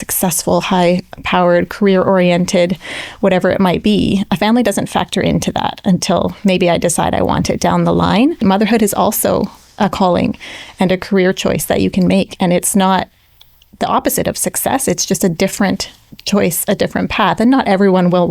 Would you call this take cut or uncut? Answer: cut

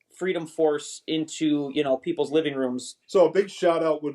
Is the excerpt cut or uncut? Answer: cut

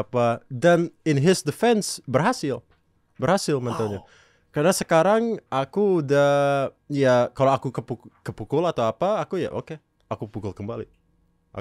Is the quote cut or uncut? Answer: uncut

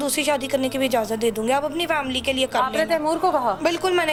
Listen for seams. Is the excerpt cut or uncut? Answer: uncut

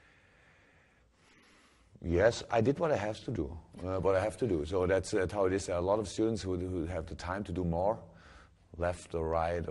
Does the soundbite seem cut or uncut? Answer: cut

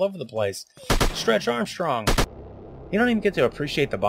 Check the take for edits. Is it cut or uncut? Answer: cut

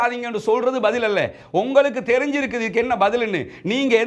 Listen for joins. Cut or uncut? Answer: uncut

